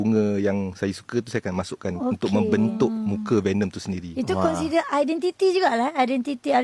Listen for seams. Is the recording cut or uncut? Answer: uncut